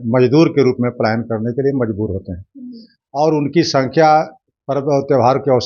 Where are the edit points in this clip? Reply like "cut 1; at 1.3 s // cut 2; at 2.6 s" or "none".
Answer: none